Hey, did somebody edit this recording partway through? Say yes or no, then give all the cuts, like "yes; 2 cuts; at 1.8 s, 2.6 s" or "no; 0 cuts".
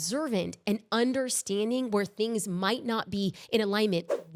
no; 0 cuts